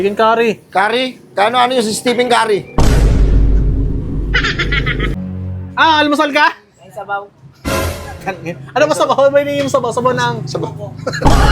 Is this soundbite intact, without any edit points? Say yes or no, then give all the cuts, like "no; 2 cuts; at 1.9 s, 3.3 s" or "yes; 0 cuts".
no; 1 cut; at 5.1 s